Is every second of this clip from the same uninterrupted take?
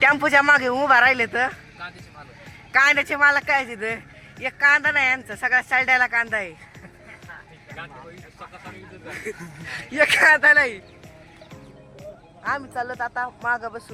yes; 0 cuts

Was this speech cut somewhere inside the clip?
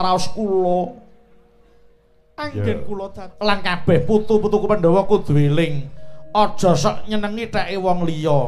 yes; 1 cut; at 3.2 s

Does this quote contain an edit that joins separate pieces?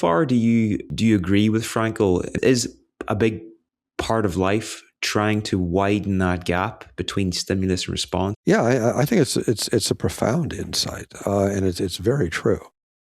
yes; 3 cuts; at 0.9 s, 2.3 s, 8.4 s

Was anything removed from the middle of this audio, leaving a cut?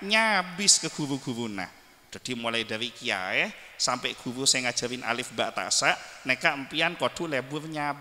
no; 0 cuts

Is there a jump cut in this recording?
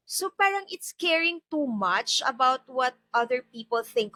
no; 0 cuts

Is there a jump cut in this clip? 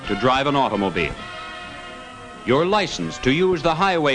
no; 0 cuts

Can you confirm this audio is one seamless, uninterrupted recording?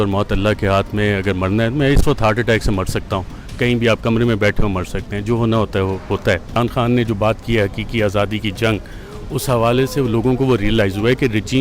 no; 1 cut; at 6.6 s

